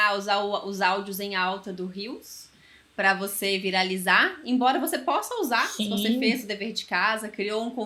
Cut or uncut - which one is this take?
uncut